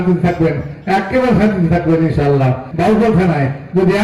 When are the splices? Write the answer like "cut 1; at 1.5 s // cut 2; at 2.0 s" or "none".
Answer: cut 1; at 2.7 s